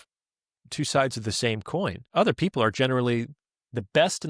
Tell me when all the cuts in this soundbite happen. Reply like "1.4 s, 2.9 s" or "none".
2.0 s